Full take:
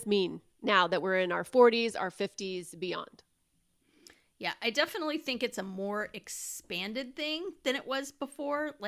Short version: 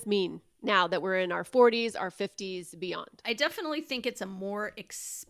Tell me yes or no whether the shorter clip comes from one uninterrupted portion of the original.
no